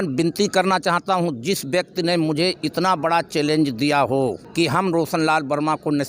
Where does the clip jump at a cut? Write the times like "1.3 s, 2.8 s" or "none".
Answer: 4.4 s